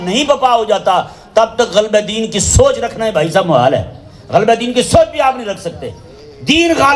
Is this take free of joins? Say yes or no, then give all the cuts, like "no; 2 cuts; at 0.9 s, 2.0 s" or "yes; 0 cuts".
yes; 0 cuts